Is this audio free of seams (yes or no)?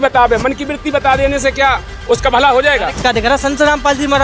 no